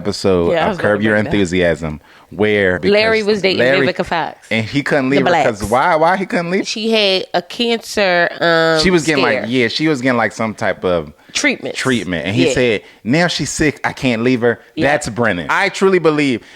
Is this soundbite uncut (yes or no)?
no